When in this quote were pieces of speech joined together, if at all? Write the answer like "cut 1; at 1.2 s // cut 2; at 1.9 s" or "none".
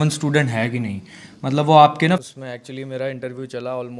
cut 1; at 2.2 s